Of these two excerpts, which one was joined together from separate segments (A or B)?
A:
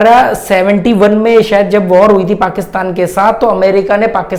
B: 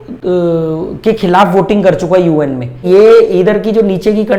B